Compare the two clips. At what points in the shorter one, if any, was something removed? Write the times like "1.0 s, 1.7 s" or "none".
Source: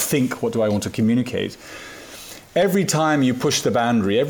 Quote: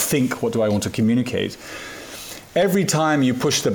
none